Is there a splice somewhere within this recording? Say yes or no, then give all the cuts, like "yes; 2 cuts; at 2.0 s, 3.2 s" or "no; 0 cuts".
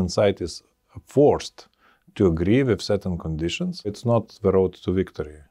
no; 0 cuts